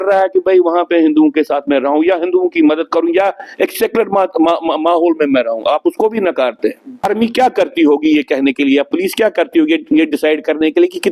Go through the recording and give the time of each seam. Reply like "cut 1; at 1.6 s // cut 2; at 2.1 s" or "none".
cut 1; at 7.1 s